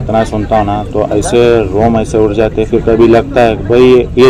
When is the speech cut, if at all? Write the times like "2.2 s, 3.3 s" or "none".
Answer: none